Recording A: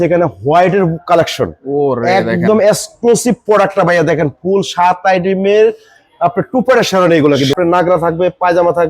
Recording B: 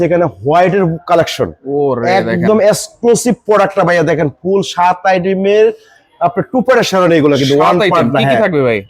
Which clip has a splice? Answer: A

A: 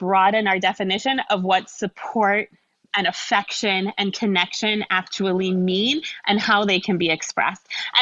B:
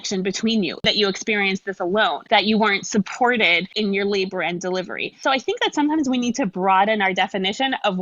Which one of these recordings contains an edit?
B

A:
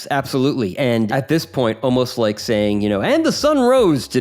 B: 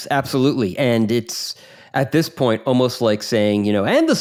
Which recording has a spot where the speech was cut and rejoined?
A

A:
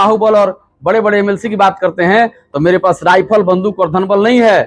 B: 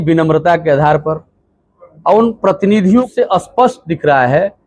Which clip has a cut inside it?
B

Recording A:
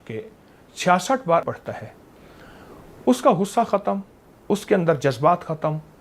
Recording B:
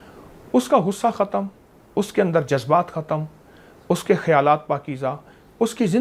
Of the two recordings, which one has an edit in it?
A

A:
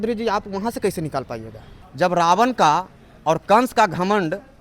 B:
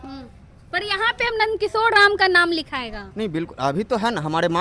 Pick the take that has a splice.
A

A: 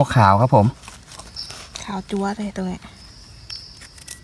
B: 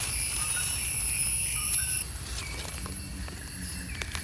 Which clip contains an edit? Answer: B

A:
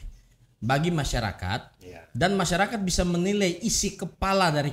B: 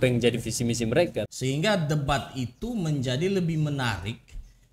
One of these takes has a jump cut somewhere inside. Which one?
B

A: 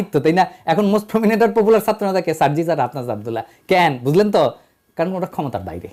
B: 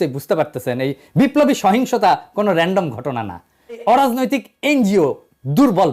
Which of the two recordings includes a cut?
B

